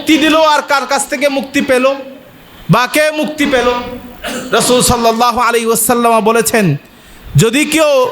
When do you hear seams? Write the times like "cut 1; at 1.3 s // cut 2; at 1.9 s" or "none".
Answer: none

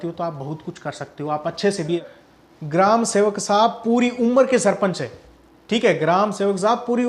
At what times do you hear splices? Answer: cut 1; at 2.1 s

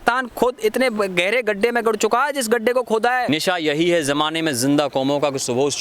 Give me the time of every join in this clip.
cut 1; at 3.3 s

